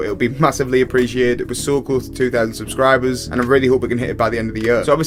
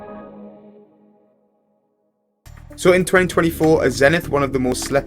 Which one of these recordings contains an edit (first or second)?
second